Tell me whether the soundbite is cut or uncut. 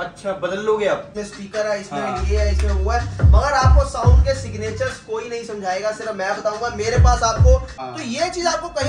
cut